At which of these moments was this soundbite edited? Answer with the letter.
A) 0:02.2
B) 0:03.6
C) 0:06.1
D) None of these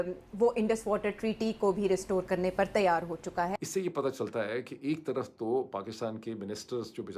B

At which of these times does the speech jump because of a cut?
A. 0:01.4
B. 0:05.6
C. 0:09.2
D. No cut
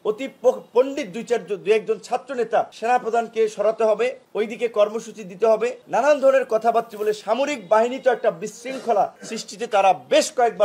D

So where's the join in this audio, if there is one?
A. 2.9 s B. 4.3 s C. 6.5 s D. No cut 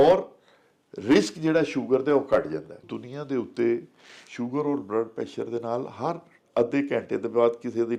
A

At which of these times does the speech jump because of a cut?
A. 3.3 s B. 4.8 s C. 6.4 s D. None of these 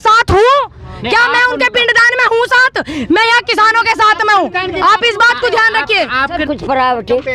C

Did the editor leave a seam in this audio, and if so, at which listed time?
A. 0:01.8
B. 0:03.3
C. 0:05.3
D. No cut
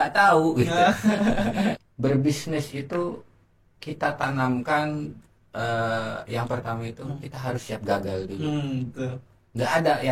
A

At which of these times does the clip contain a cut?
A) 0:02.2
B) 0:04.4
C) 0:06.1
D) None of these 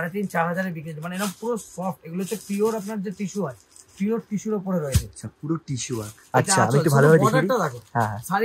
C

